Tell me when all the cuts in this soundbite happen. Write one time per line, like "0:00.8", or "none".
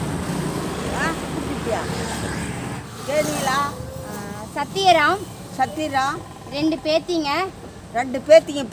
0:02.9